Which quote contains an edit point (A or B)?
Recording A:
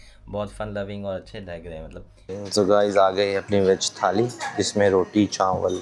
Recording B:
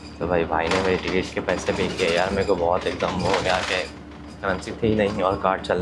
A